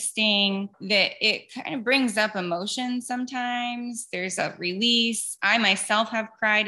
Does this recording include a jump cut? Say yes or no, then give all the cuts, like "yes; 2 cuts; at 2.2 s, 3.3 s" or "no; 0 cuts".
no; 0 cuts